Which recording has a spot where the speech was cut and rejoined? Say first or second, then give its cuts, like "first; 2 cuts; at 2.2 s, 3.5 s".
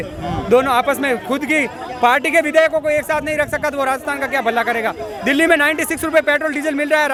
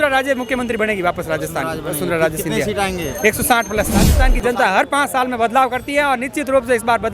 second; 1 cut; at 4.2 s